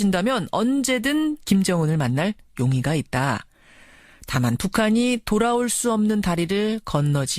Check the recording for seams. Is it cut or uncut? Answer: cut